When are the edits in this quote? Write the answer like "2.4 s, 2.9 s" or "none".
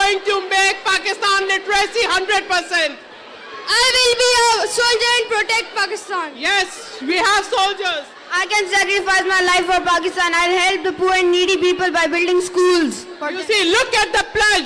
none